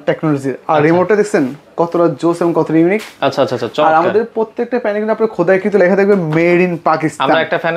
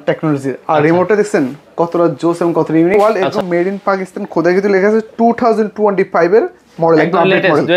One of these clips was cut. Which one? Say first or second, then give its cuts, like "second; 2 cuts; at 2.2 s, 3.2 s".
second; 1 cut; at 3.0 s